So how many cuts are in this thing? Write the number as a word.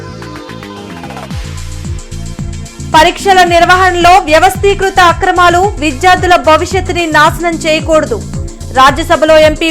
zero